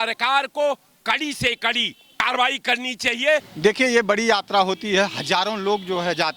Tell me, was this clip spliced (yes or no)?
yes